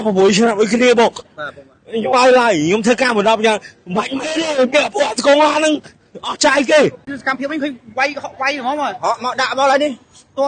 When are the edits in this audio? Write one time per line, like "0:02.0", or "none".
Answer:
0:07.1

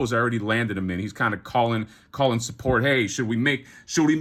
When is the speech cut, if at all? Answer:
none

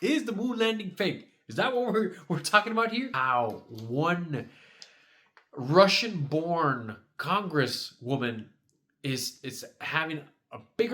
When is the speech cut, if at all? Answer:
0:03.1

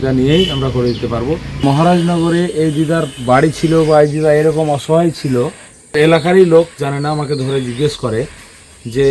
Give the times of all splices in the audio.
0:01.8
0:06.2

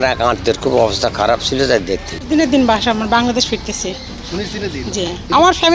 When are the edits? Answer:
0:02.1

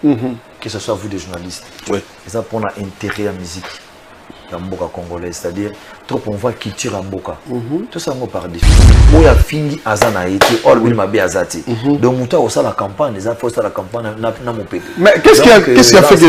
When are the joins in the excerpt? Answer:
0:08.8

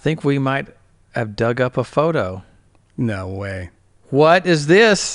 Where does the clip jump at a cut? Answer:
none

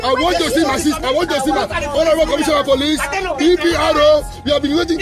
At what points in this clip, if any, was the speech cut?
0:01.0

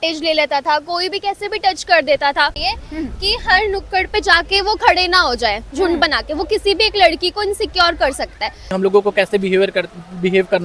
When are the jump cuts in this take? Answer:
0:02.6
0:08.7

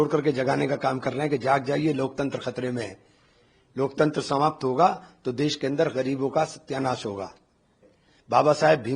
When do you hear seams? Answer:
0:07.8

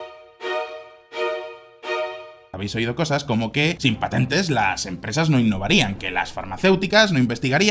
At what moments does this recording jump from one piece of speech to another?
0:01.3
0:02.5

